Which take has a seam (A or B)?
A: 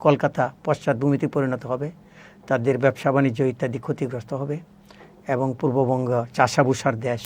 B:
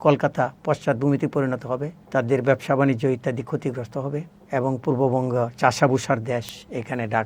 B